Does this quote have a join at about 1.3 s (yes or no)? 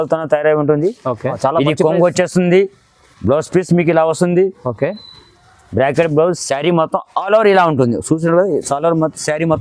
yes